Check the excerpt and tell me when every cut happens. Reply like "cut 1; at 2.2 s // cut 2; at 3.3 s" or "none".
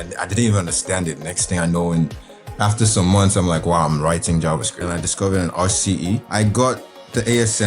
cut 1; at 4.7 s // cut 2; at 6.3 s